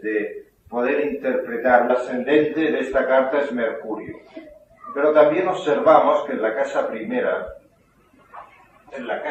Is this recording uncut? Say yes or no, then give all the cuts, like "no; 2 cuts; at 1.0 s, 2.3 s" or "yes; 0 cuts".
yes; 0 cuts